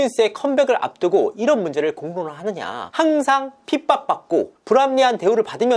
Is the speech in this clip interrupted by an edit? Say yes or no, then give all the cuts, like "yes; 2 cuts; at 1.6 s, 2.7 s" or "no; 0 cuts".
yes; 1 cut; at 2.8 s